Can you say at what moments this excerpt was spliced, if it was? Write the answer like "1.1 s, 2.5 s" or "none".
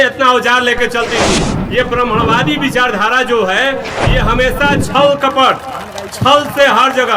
1.5 s